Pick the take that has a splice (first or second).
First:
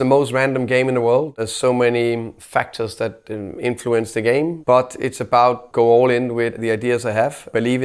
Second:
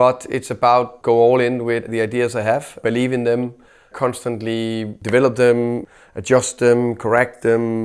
first